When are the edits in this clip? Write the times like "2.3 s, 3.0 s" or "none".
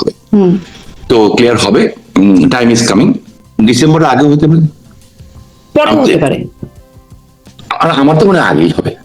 3.4 s